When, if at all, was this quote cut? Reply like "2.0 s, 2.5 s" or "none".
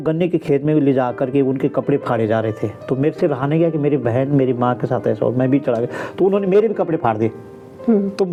none